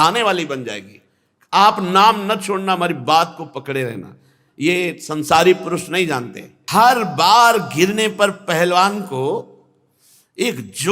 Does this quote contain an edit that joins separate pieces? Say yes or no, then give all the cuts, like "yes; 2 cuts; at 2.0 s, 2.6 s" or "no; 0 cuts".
yes; 1 cut; at 6.6 s